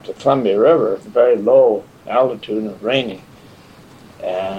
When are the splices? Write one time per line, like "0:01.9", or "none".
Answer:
0:01.0

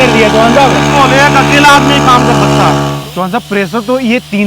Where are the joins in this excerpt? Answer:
0:02.9

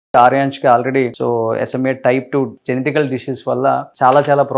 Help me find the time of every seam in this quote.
0:01.1
0:02.6

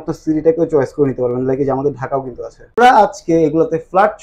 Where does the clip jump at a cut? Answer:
0:02.8

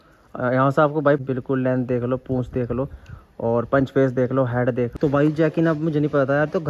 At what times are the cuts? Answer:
0:01.2
0:04.9

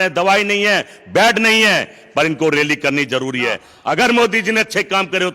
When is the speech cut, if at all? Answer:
0:03.7

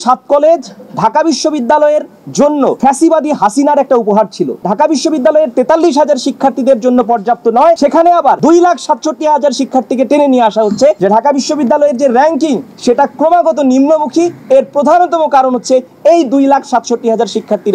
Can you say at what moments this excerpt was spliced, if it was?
0:04.6
0:11.0

